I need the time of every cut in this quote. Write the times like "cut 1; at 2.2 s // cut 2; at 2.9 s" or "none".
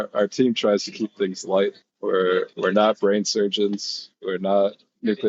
none